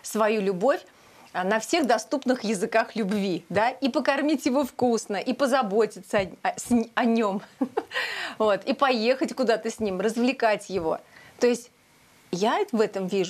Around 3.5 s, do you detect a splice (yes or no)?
no